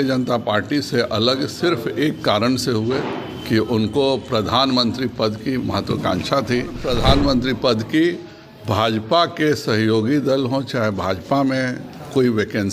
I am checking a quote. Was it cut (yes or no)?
yes